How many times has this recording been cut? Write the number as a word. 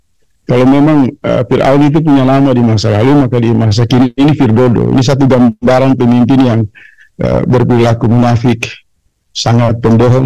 zero